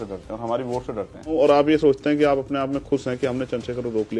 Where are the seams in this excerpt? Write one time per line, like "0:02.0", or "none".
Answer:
0:01.3